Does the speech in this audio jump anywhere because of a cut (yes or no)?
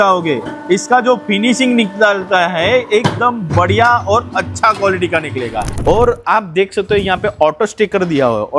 yes